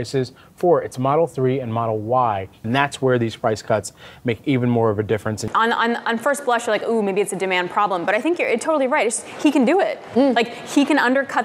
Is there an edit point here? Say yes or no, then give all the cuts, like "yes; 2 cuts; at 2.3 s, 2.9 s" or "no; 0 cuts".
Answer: yes; 2 cuts; at 2.6 s, 5.4 s